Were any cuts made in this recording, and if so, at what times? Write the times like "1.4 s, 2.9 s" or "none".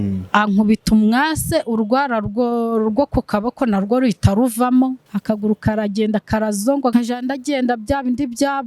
5.1 s, 6.9 s